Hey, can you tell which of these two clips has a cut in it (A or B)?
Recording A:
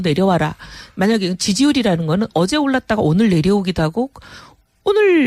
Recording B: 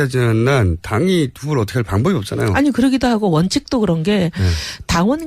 B